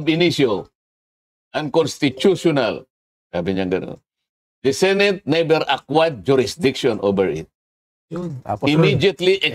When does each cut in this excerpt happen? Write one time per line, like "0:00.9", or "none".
none